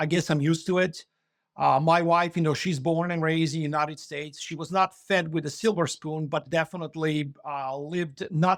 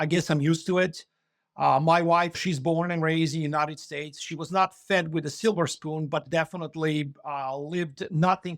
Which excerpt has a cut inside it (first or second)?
second